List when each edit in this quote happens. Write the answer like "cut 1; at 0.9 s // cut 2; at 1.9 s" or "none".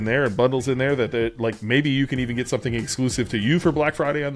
none